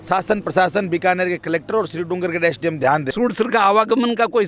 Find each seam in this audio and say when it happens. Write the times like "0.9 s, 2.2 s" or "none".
3.1 s